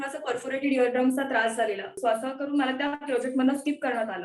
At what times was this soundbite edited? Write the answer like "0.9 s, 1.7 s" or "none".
2.0 s